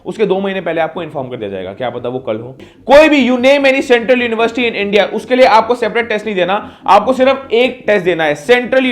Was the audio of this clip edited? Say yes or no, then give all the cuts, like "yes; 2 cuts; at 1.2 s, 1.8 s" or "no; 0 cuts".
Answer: yes; 1 cut; at 2.7 s